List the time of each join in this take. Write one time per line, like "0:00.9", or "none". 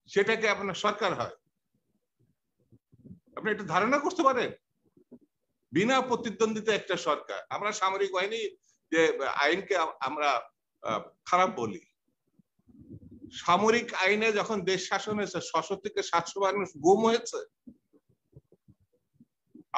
none

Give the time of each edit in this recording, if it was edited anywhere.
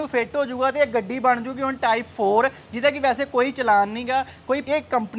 0:04.3

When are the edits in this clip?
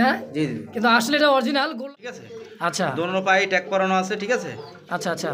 0:01.8

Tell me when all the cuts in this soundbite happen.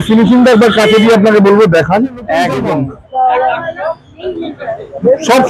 0:02.7

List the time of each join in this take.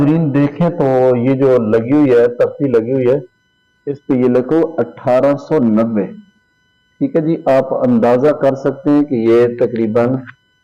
none

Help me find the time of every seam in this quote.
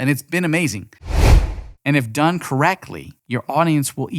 0:01.2

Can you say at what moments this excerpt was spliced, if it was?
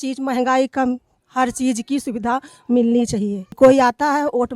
0:03.5

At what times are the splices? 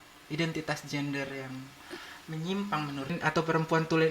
0:03.2

